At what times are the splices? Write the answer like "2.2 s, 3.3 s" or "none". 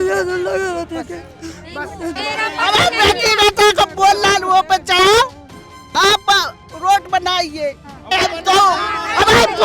2.2 s